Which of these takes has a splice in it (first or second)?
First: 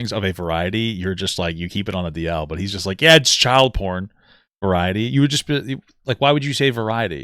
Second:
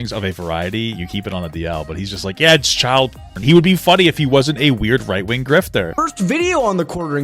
second